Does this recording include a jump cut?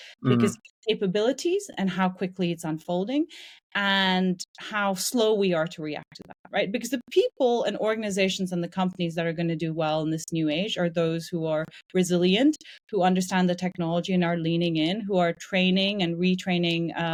no; 0 cuts

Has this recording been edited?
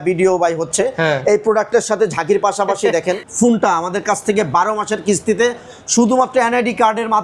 yes; 1 cut; at 3.3 s

